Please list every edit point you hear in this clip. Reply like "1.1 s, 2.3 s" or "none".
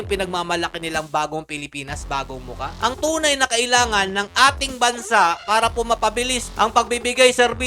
2.7 s